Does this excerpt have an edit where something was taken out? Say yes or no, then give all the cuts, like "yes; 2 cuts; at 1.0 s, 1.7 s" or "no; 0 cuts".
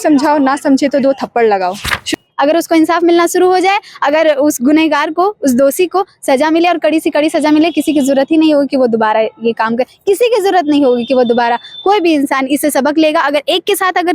yes; 1 cut; at 2.0 s